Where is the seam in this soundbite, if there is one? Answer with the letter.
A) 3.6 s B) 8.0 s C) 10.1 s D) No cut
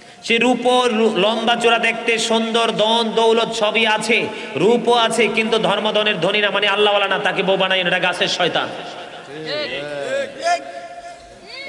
D